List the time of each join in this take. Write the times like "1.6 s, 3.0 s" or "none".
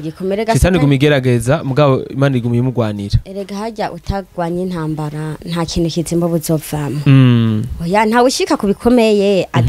none